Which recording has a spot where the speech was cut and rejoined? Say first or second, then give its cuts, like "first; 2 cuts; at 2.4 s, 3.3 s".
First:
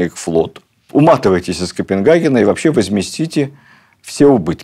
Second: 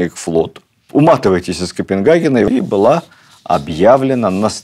second; 1 cut; at 2.5 s